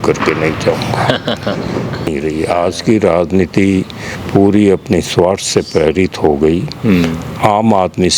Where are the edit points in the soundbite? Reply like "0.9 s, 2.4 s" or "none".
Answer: 2.1 s